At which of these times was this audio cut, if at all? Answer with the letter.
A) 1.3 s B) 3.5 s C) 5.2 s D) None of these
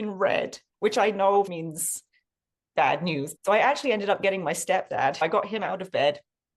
C